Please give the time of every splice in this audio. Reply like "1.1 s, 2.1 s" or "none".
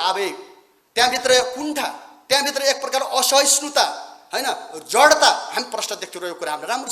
none